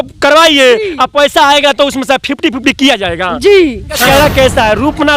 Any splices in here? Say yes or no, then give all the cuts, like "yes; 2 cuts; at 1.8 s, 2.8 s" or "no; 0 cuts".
yes; 1 cut; at 4.0 s